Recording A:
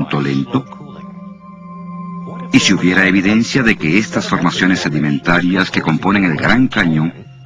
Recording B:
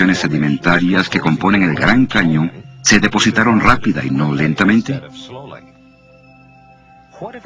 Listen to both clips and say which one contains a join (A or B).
A